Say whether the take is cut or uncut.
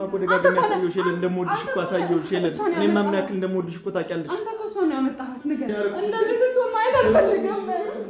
cut